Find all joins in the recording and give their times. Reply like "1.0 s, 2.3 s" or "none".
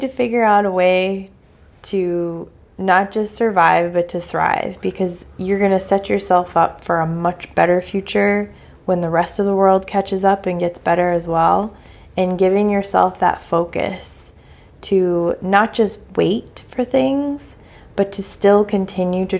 none